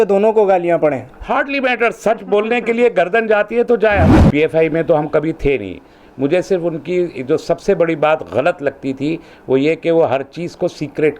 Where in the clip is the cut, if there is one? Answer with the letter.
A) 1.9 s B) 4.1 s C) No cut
B